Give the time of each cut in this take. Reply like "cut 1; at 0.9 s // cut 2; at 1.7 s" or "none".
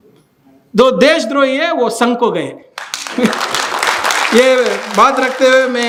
none